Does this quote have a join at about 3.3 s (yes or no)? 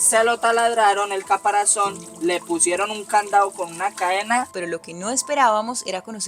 no